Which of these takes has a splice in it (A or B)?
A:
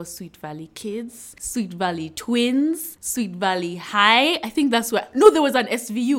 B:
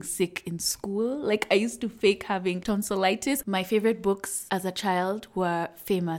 B